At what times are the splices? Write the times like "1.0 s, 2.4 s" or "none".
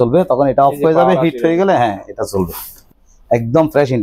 2.9 s